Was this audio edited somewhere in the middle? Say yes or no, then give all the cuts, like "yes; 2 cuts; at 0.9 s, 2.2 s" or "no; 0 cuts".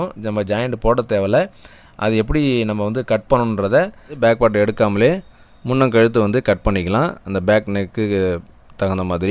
yes; 1 cut; at 4.2 s